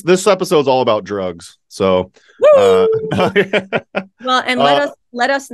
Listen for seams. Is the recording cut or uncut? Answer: uncut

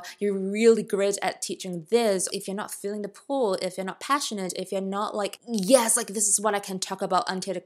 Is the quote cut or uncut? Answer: cut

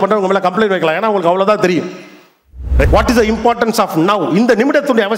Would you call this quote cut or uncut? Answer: cut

